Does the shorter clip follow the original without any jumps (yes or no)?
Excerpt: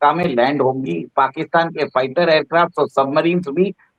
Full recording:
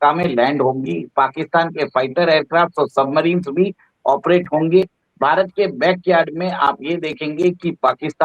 yes